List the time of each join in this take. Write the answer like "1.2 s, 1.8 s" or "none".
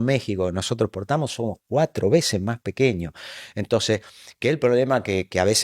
none